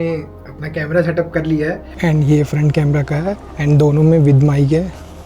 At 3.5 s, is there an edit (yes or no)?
yes